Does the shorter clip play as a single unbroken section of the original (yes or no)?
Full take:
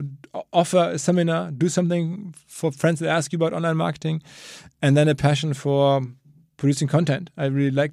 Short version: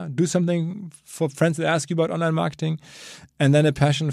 yes